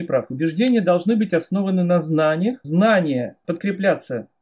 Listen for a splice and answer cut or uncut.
cut